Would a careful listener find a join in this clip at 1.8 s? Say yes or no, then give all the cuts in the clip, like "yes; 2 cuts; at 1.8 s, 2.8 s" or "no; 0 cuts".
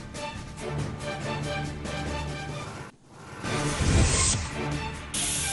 yes; 1 cut; at 1.8 s